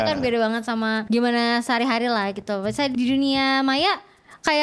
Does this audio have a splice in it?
yes; 2 cuts; at 1.0 s, 2.9 s

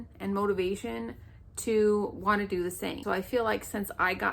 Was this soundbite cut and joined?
yes; 1 cut; at 3.0 s

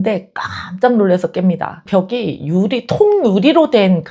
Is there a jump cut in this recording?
no; 0 cuts

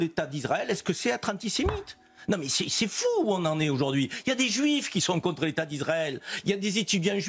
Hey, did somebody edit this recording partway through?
no; 0 cuts

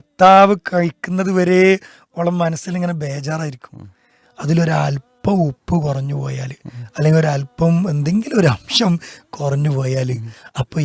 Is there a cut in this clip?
no; 0 cuts

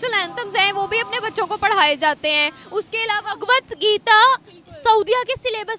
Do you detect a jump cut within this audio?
no; 0 cuts

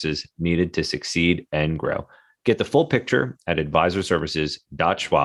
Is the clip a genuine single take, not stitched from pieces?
yes; 0 cuts

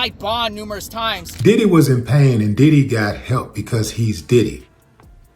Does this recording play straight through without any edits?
no; 1 cut; at 1.3 s

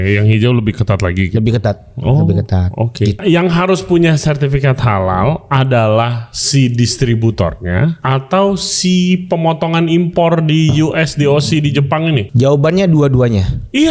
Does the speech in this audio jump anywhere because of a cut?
yes; 3 cuts; at 3.2 s, 8.0 s, 12.3 s

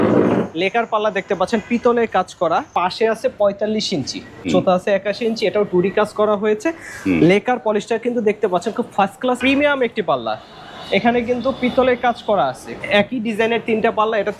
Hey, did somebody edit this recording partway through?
yes; 4 cuts; at 2.7 s, 4.5 s, 9.4 s, 12.7 s

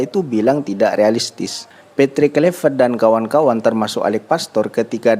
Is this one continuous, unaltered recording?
no; 1 cut; at 1.7 s

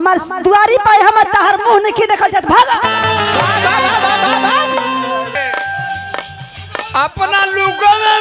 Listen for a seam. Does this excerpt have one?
yes; 1 cut; at 5.3 s

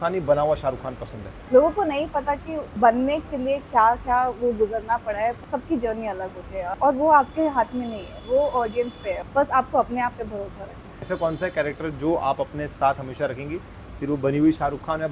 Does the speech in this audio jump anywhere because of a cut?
yes; 6 cuts; at 1.3 s, 2.6 s, 5.4 s, 6.7 s, 9.2 s, 10.9 s

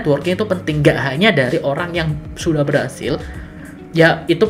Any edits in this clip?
no; 0 cuts

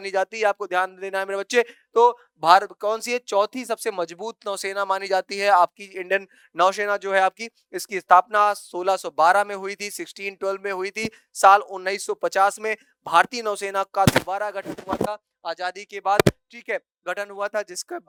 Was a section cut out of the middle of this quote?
no; 0 cuts

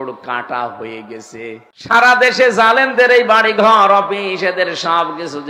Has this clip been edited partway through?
yes; 1 cut; at 1.7 s

